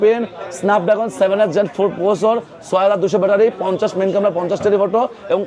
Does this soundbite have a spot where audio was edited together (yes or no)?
no